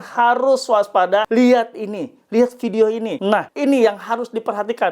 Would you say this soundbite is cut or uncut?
cut